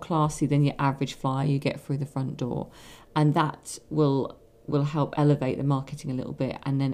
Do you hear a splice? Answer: no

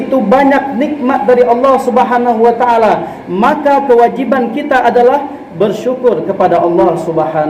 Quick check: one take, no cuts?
yes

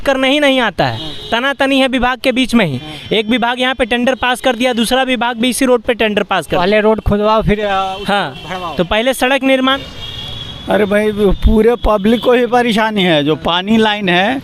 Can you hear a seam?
yes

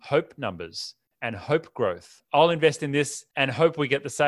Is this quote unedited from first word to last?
no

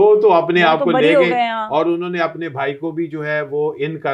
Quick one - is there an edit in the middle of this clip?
no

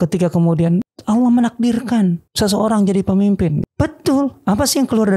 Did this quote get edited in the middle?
yes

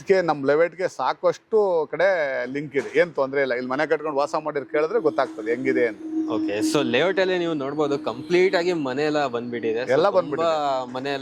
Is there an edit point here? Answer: no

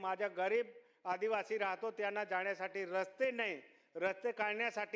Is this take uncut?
yes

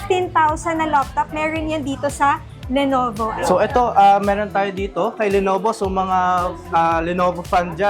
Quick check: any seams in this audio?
no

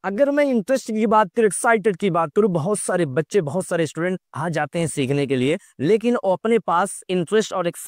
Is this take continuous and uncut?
yes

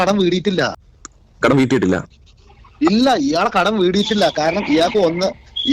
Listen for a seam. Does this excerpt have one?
no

